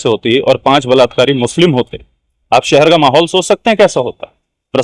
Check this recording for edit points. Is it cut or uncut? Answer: uncut